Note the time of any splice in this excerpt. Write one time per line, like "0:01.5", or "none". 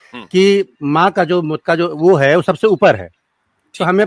0:01.6